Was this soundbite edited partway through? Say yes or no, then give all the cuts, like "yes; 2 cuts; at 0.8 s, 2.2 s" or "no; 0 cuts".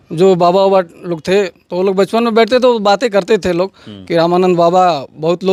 no; 0 cuts